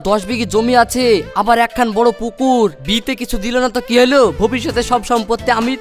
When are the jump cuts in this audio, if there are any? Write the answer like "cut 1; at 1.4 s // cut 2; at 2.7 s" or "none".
none